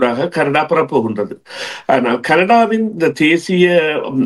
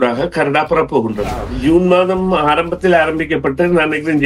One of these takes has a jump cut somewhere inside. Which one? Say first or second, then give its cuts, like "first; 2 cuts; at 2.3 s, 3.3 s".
second; 1 cut; at 1.6 s